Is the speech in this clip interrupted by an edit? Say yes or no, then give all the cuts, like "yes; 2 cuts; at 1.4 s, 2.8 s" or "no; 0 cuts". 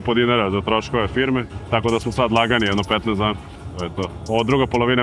no; 0 cuts